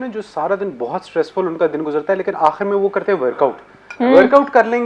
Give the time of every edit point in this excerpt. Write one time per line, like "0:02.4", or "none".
none